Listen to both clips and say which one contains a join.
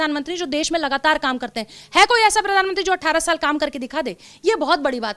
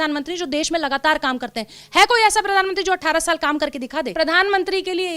second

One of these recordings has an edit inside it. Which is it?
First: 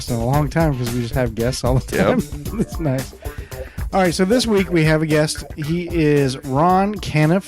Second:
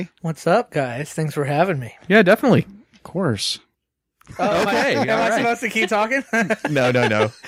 first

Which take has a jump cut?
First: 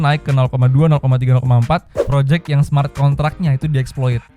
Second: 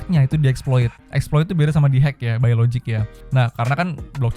first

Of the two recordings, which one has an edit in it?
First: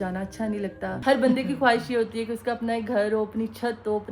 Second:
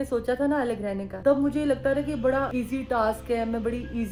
first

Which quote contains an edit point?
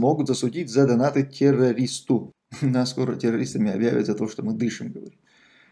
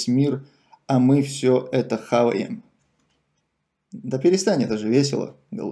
first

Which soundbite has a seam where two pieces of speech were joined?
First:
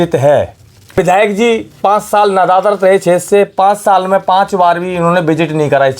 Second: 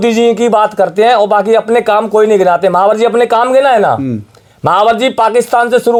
first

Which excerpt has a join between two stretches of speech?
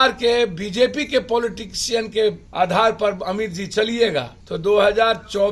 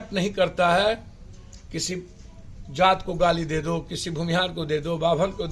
first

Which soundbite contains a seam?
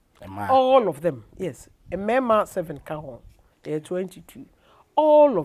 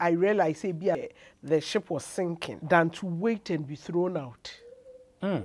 second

